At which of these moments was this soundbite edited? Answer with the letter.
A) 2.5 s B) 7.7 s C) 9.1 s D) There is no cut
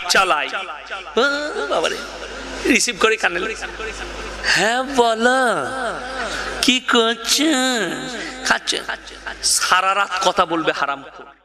D